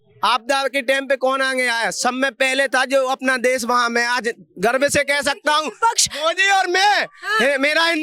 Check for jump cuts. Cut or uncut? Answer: uncut